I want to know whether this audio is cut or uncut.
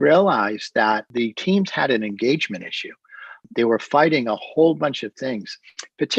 cut